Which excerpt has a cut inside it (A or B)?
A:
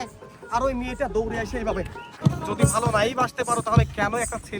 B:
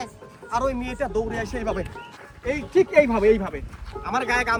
A